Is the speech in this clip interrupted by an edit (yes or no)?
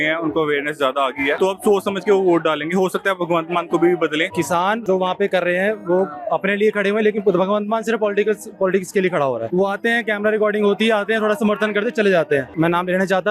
yes